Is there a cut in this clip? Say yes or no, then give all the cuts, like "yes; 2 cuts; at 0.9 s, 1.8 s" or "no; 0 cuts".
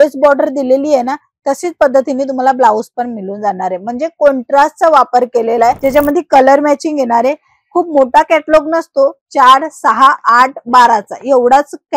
yes; 1 cut; at 5.8 s